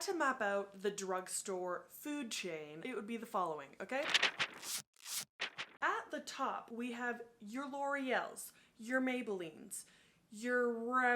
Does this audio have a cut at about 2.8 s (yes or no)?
yes